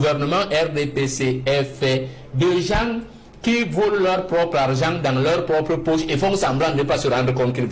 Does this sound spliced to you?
no; 0 cuts

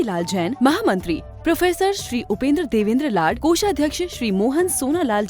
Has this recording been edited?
no; 0 cuts

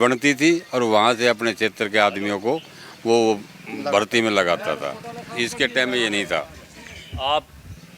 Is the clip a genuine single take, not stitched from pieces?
yes; 0 cuts

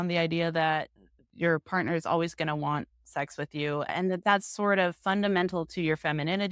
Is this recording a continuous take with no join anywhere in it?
no; 1 cut; at 3.9 s

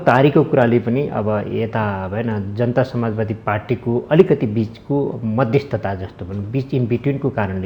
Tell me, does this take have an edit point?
no; 0 cuts

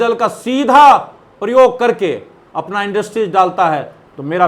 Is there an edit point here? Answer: no; 0 cuts

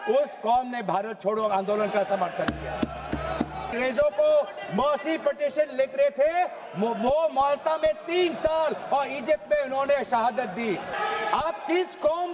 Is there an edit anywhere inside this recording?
yes; 2 cuts; at 3.7 s, 11.0 s

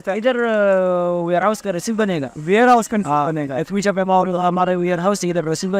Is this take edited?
no; 0 cuts

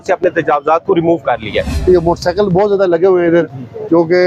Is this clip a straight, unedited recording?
no; 1 cut; at 1.7 s

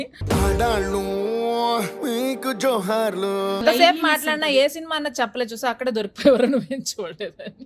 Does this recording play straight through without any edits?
no; 1 cut; at 3.6 s

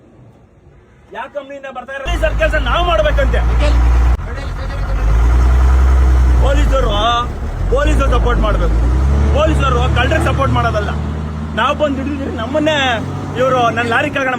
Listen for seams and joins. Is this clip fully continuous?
no; 1 cut; at 2.1 s

